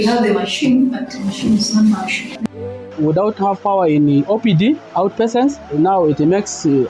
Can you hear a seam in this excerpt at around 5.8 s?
no; 1 cut; at 2.3 s

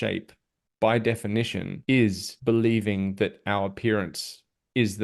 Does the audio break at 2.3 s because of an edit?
yes; 2 cuts; at 1.7 s, 2.3 s

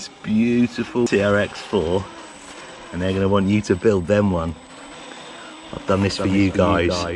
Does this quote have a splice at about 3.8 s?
no; 1 cut; at 1.1 s

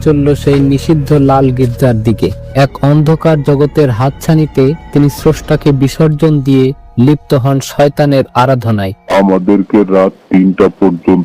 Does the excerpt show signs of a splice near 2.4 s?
yes; 2 cuts; at 2.4 s, 9.1 s

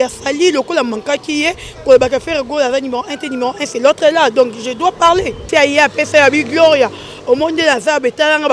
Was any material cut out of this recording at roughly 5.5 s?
yes; 1 cut; at 5.5 s

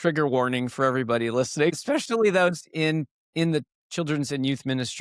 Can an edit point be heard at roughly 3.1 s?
no; 1 cut; at 1.8 s

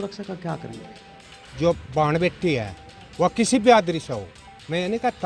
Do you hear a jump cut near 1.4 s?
yes; 1 cut; at 1.4 s

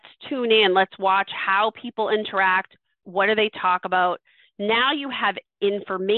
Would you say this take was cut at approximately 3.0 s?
yes; 1 cut; at 3.0 s

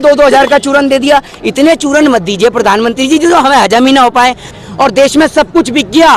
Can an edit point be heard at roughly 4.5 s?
yes; 1 cut; at 4.5 s

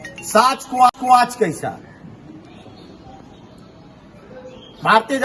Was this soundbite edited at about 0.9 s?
no; 0 cuts

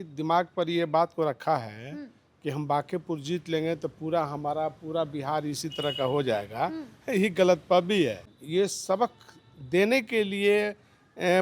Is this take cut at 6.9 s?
no; 1 cut; at 8.2 s

